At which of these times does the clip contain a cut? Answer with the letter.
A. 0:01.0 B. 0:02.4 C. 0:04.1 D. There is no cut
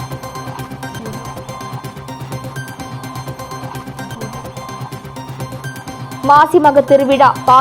A